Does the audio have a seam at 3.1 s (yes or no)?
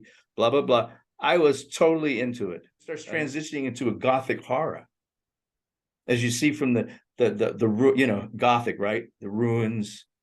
yes